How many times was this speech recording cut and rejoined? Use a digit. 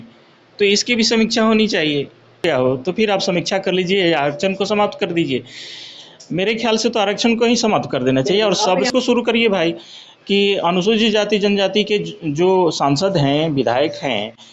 2